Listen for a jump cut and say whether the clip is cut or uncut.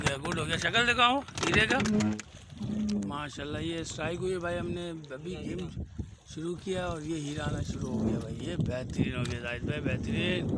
cut